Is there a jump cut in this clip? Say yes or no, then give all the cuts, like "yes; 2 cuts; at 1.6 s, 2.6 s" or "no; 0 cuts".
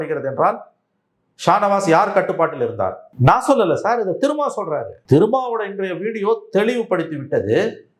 yes; 2 cuts; at 3.1 s, 4.9 s